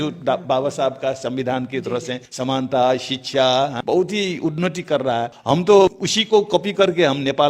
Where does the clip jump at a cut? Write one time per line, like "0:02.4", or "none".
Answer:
0:02.2
0:03.8
0:05.4
0:06.1